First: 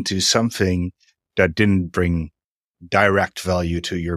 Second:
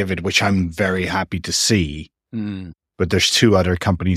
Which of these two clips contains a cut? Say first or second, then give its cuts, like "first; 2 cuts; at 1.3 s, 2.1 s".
second; 1 cut; at 2.7 s